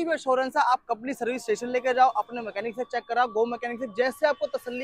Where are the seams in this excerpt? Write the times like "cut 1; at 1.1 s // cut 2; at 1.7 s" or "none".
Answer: none

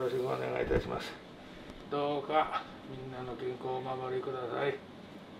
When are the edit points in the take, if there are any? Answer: none

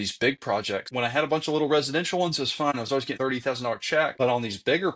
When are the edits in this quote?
cut 1; at 0.9 s // cut 2; at 3.0 s // cut 3; at 4.1 s

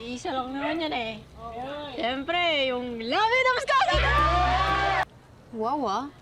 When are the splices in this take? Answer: cut 1; at 5.0 s

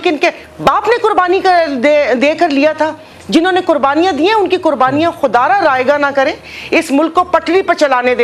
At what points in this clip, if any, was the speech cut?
none

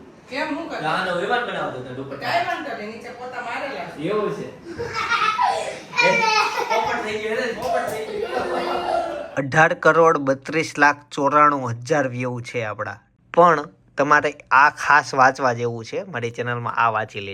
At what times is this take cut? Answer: cut 1; at 9.2 s // cut 2; at 13.1 s

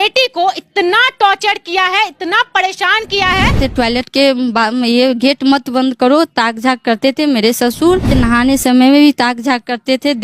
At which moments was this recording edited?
cut 1; at 3.6 s // cut 2; at 8.1 s

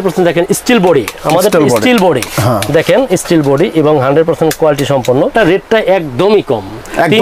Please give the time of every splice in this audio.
cut 1; at 5.3 s

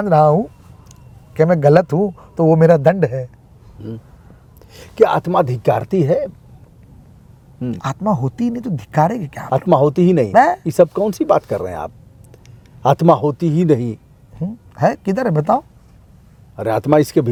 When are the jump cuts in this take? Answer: none

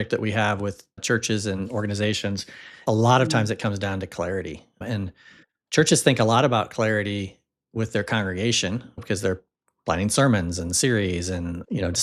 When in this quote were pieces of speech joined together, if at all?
cut 1; at 1.0 s // cut 2; at 2.8 s

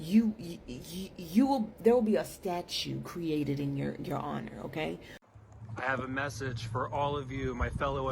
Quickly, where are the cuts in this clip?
cut 1; at 5.1 s

